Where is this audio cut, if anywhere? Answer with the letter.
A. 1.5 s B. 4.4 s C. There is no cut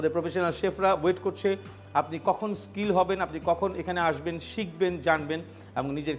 C